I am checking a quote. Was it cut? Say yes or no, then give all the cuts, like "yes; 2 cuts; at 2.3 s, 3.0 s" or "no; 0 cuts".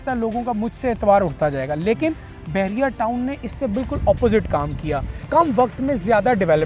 yes; 1 cut; at 5.1 s